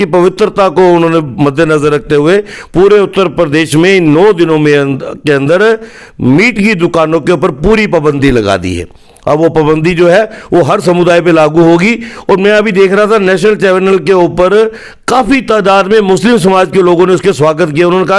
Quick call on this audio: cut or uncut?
uncut